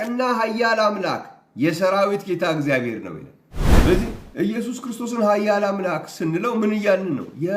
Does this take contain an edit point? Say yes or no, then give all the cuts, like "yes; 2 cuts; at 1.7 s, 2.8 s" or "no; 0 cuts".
yes; 1 cut; at 3.8 s